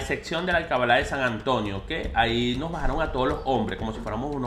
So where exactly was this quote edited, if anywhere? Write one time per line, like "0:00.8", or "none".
none